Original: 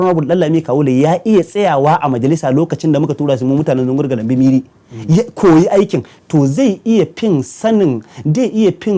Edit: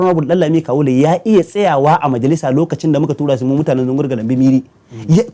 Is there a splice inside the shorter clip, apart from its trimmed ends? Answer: no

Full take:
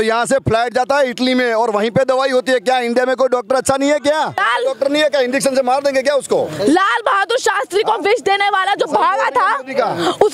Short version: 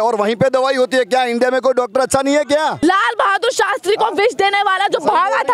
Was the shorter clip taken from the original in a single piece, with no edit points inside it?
no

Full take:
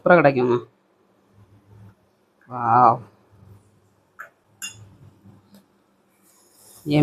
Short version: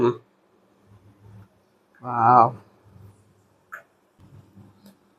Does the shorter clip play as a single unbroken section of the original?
no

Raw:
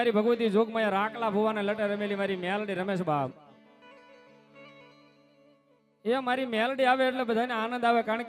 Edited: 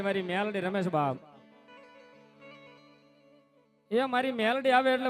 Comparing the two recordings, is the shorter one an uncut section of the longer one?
yes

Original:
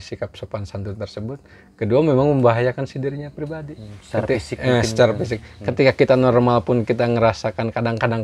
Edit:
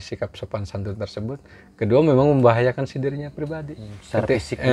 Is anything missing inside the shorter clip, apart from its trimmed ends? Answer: no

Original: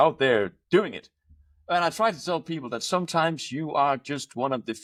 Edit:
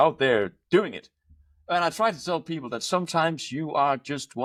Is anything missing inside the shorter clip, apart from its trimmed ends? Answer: no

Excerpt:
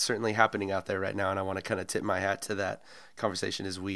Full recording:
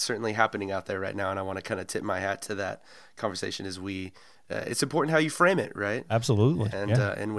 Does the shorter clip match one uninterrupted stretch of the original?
yes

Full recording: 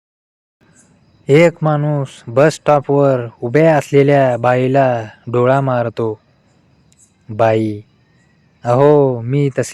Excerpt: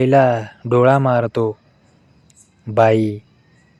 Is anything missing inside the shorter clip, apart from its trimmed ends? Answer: no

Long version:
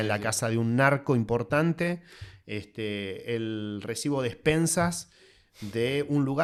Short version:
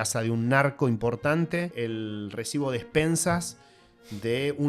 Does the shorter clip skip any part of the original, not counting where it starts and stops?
yes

